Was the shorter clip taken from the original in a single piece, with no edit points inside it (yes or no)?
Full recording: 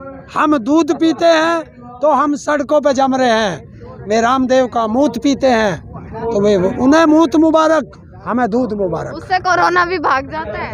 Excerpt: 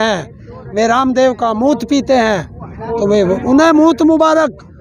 yes